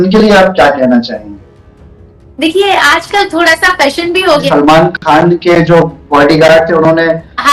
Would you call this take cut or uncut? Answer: cut